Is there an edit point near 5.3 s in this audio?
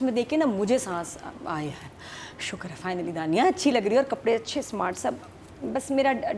no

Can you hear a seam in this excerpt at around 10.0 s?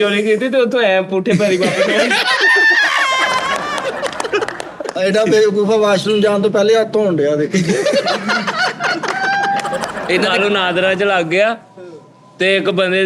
yes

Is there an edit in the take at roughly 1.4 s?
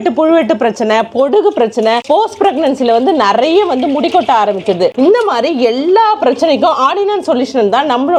no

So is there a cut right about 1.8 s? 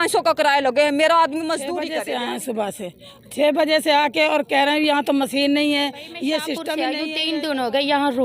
yes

